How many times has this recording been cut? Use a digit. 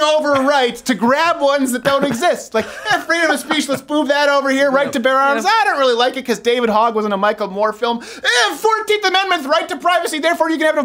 0